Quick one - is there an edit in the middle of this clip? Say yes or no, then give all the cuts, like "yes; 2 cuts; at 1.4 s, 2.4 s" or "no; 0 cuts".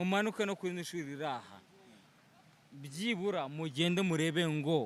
no; 0 cuts